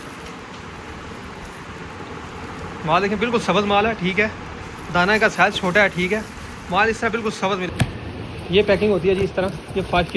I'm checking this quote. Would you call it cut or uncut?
cut